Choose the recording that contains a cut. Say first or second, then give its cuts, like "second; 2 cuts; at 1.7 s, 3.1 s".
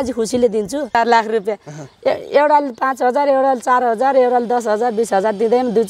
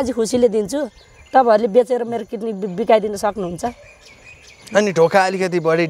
first; 1 cut; at 1.0 s